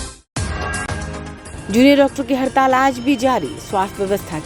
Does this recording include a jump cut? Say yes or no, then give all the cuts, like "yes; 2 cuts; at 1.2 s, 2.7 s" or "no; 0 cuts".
no; 0 cuts